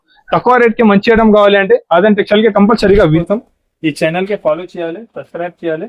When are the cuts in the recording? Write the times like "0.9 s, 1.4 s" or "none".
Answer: 3.2 s